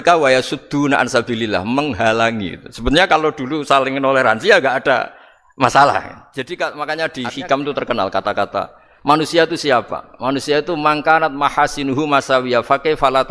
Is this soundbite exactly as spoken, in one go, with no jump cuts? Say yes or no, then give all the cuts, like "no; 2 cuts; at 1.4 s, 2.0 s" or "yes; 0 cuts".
no; 1 cut; at 6.2 s